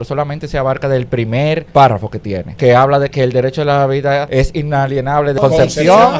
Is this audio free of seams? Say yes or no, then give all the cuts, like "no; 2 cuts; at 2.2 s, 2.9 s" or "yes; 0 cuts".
no; 4 cuts; at 1.7 s, 2.4 s, 4.3 s, 5.4 s